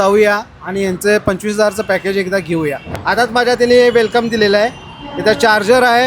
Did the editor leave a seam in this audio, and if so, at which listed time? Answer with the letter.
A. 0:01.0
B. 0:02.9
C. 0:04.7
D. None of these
B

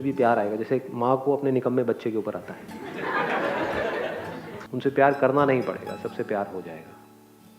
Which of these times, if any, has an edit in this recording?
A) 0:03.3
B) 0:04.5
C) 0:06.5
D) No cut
B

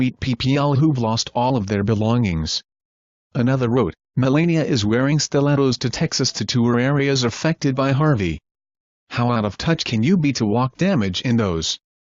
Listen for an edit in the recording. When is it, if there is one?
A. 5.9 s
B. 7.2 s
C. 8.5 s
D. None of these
B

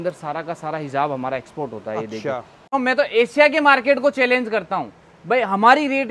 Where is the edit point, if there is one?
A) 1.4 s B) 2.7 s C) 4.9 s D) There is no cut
B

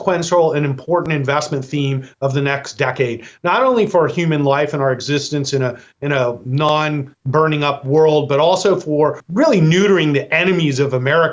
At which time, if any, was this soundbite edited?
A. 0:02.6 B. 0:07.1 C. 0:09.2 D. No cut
C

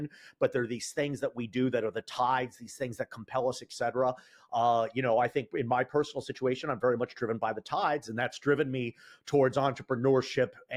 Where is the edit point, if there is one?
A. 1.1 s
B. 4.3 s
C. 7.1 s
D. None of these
D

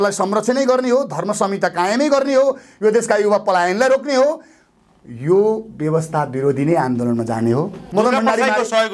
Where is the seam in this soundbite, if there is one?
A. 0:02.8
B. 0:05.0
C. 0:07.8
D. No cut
C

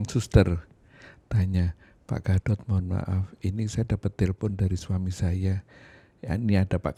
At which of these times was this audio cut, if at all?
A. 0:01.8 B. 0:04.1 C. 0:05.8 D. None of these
D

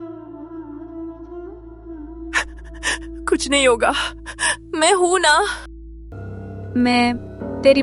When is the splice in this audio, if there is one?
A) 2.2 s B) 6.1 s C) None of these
B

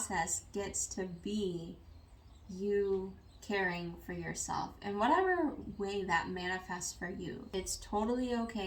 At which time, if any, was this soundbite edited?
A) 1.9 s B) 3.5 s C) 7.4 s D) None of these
C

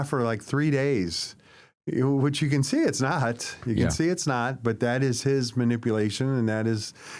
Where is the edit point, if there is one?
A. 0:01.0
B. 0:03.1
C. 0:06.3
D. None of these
D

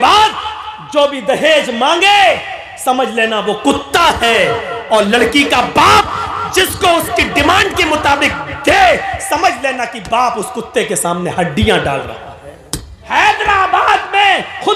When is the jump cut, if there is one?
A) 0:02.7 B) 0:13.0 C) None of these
B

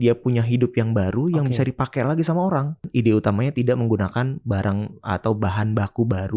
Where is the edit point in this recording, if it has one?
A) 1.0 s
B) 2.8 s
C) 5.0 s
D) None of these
B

